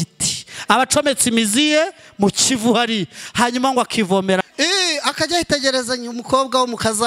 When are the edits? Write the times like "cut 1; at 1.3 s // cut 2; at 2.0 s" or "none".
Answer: cut 1; at 4.4 s